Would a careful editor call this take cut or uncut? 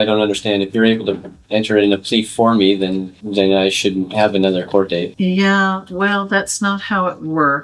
uncut